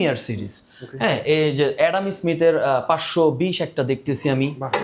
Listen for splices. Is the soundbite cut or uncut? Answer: uncut